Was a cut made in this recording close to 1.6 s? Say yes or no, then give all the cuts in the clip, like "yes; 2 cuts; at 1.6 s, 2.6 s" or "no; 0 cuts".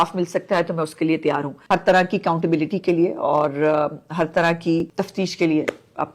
yes; 2 cuts; at 1.6 s, 4.9 s